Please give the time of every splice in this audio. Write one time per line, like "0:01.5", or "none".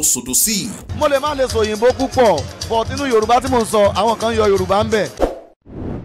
0:05.1